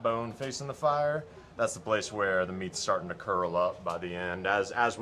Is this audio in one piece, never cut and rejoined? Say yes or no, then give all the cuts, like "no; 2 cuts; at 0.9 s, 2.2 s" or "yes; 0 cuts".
yes; 0 cuts